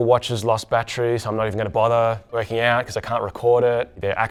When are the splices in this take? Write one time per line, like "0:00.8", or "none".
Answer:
none